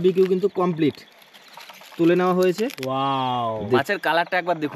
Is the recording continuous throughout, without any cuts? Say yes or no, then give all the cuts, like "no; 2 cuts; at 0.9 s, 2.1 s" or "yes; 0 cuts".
no; 1 cut; at 3.8 s